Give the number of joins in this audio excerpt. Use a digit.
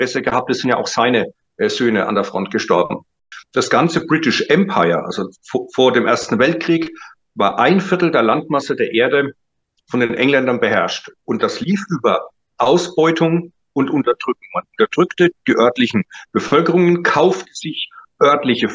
1